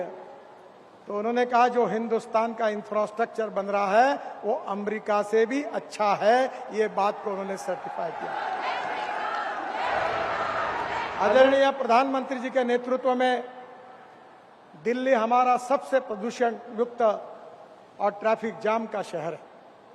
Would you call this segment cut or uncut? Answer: uncut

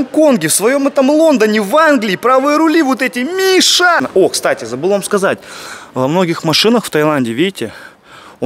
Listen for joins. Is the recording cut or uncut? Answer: cut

